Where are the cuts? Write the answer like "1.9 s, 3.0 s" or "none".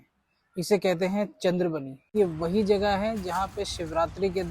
2.1 s